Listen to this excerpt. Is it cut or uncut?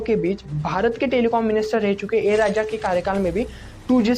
uncut